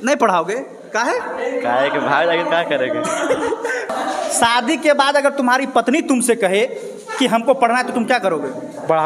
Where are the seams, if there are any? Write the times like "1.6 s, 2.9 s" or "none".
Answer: 3.9 s